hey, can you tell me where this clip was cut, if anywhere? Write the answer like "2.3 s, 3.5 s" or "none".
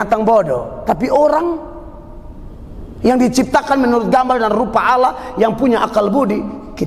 none